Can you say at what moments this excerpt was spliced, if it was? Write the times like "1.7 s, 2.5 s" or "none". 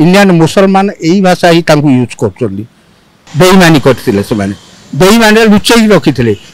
3.2 s